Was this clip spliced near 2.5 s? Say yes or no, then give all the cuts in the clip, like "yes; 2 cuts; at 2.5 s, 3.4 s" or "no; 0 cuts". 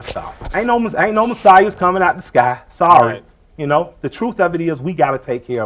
no; 1 cut; at 4.4 s